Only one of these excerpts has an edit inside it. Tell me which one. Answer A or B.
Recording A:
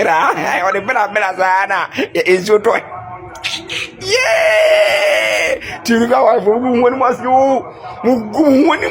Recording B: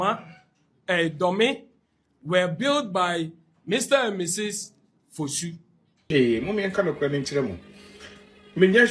B